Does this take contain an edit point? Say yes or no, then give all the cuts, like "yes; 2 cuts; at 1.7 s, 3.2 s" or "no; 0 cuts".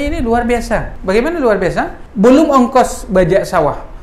yes; 2 cuts; at 0.9 s, 2.0 s